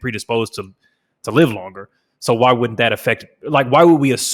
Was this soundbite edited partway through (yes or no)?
no